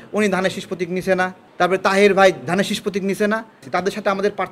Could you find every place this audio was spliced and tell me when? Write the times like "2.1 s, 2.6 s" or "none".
1.4 s, 3.6 s